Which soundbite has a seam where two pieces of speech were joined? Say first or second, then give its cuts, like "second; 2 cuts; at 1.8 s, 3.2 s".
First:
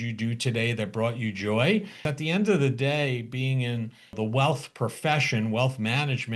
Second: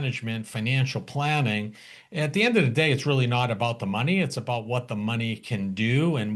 first; 2 cuts; at 2.1 s, 4.1 s